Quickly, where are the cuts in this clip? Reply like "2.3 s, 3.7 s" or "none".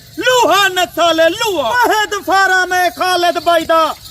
1.8 s